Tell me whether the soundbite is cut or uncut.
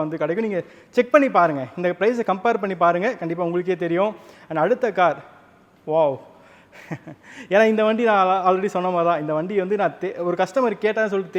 uncut